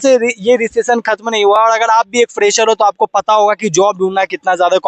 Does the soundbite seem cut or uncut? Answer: uncut